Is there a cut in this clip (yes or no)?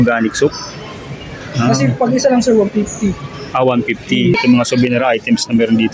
yes